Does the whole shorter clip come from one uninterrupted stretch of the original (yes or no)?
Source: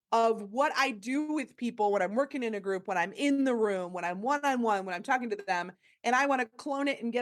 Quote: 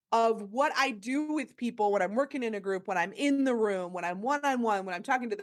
yes